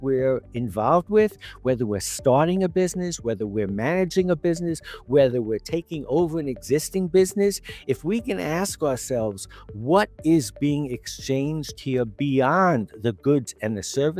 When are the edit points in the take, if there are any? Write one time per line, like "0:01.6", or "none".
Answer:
none

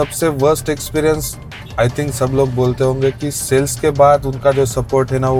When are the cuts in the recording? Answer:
none

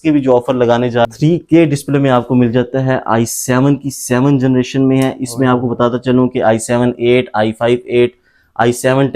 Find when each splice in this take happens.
0:01.0

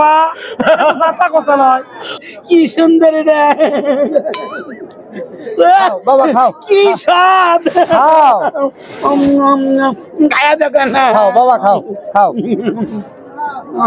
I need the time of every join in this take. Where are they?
0:02.2

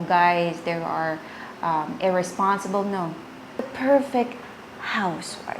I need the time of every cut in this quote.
0:03.7

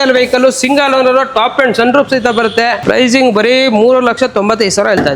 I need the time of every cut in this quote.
0:02.8

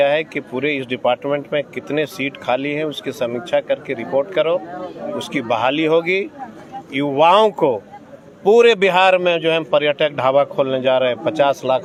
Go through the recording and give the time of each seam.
none

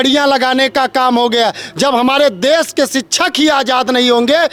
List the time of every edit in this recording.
none

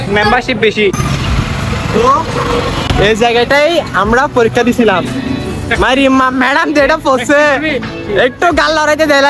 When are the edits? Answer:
none

